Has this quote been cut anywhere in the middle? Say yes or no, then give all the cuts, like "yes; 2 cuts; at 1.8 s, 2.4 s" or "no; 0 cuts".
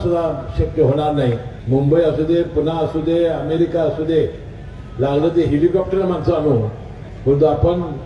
yes; 1 cut; at 1.5 s